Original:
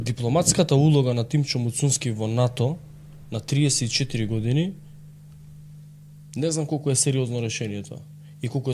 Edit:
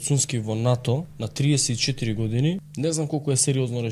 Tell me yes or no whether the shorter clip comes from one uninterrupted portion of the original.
no